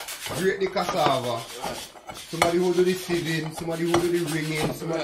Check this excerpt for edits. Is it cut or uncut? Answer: uncut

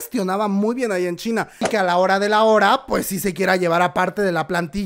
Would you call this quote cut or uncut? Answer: cut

